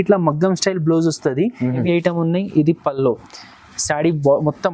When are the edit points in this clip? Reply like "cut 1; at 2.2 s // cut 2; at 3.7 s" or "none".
cut 1; at 1.8 s